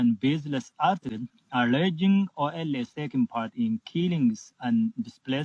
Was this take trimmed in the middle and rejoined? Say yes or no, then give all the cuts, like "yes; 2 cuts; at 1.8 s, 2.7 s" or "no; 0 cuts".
yes; 1 cut; at 1.1 s